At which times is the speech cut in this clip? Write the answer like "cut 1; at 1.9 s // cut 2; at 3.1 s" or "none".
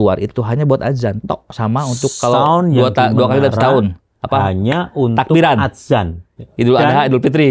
none

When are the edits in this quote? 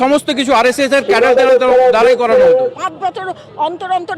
cut 1; at 2.7 s

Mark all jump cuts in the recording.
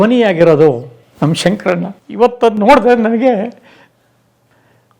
cut 1; at 2.0 s

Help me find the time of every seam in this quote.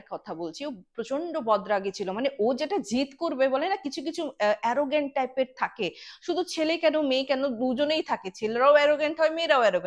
none

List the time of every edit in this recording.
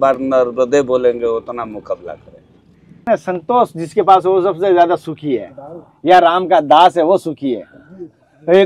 cut 1; at 3.1 s

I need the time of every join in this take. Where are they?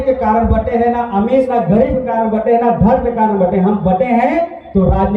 none

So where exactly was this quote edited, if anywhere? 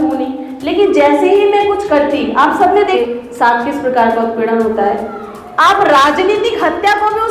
cut 1; at 3.0 s

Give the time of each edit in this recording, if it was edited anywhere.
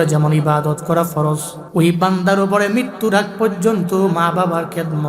cut 1; at 1.5 s

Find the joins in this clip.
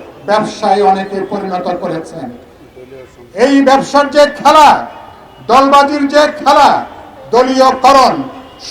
none

